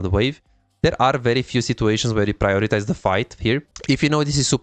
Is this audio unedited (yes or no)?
no